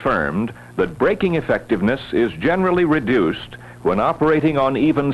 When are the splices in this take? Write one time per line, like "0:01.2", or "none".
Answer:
none